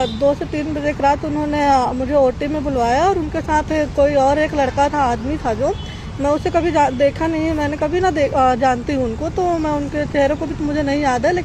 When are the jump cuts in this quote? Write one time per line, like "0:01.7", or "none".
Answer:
none